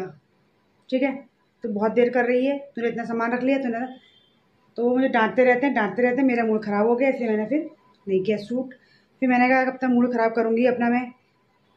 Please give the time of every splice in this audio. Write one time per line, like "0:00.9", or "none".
none